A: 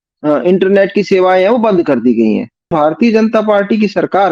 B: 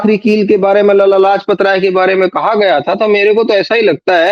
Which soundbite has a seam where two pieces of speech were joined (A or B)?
A